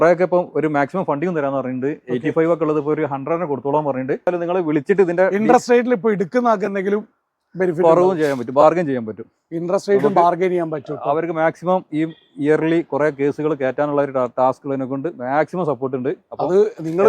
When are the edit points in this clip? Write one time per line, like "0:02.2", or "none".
0:04.3

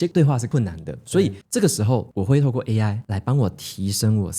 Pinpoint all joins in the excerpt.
0:01.4
0:03.1

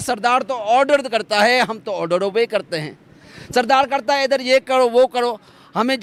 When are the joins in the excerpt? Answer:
none

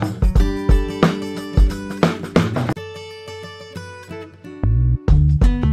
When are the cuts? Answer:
0:02.7

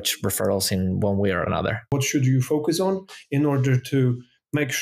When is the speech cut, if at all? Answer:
0:01.9

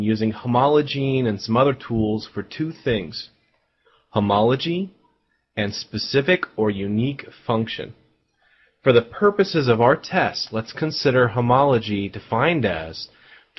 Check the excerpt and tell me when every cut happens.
0:05.1

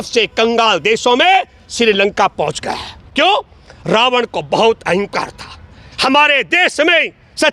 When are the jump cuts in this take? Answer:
none

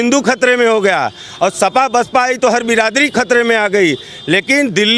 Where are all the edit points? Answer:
none

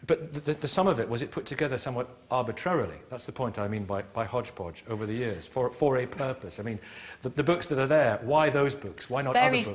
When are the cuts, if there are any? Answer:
0:04.3

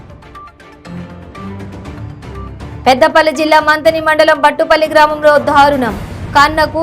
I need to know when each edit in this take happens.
none

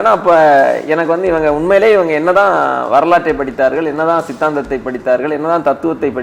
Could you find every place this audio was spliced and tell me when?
none

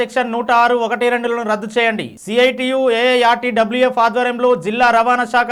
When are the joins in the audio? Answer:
none

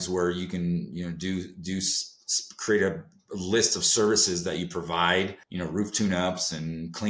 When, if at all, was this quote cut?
0:05.4

